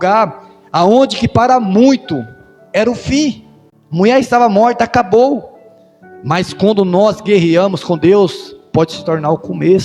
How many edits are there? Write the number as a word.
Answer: zero